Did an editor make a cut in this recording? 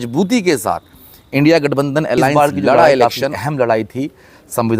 yes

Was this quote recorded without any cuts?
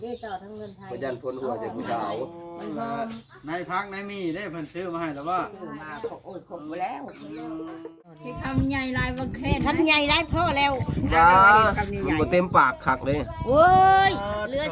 no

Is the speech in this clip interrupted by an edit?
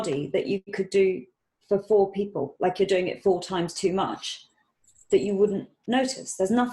no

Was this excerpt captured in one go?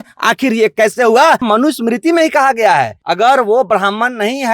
no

